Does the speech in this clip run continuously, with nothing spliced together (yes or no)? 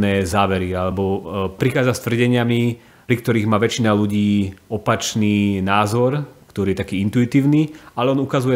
yes